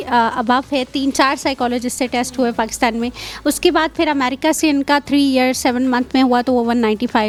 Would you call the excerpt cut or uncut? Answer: uncut